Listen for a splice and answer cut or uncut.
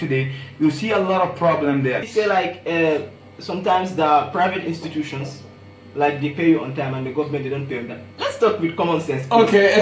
cut